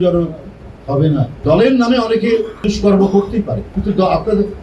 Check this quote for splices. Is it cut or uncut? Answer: cut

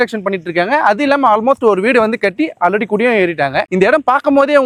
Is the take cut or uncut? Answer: uncut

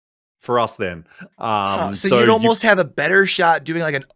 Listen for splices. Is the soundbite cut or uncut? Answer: uncut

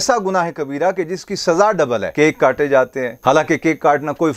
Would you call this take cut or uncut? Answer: cut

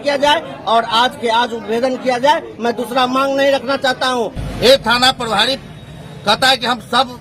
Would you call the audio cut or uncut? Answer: cut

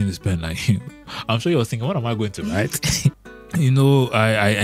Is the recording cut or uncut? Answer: cut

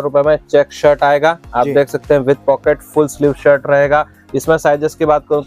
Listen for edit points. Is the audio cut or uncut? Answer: uncut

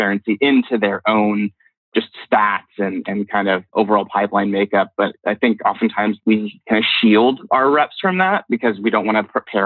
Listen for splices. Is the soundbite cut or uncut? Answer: cut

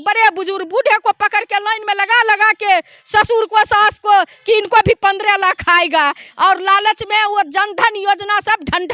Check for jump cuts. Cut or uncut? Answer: uncut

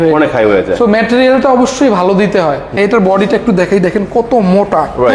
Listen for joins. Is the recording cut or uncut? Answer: cut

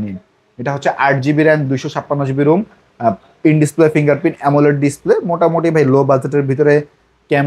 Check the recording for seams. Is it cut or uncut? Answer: uncut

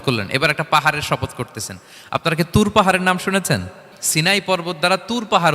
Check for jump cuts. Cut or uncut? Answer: cut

